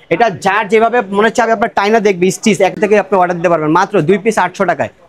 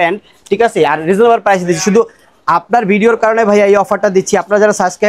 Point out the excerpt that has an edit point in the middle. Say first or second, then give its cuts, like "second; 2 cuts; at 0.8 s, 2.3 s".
first; 1 cut; at 2.7 s